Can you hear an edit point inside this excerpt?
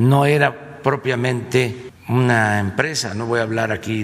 yes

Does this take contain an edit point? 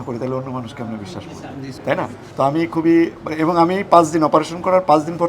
yes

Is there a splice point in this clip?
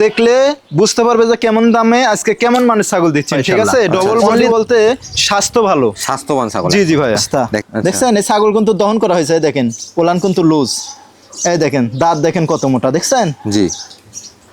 yes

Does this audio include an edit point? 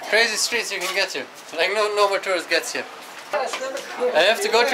yes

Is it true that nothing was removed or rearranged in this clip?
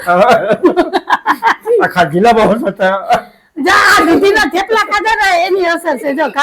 yes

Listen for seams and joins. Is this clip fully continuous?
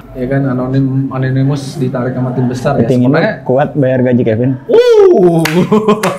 yes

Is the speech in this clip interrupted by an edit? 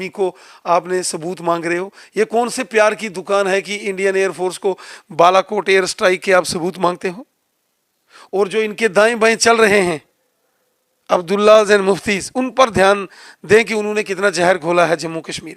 no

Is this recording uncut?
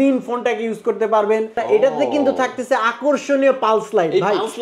no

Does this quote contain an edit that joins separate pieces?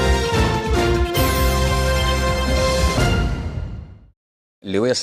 no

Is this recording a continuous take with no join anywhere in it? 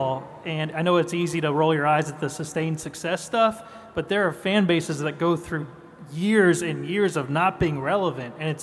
yes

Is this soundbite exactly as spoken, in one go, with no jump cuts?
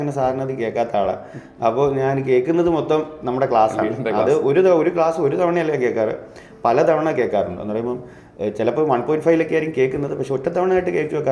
yes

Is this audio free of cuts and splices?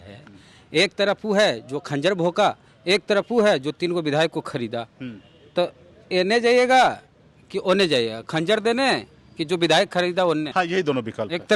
no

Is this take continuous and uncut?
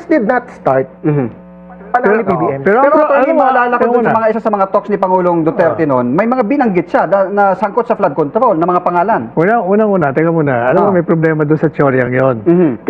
yes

